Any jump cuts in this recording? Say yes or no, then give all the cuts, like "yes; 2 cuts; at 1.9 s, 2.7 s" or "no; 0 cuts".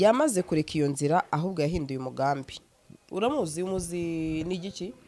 no; 0 cuts